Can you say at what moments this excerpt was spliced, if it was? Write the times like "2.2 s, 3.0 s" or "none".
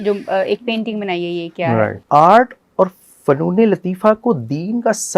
2.0 s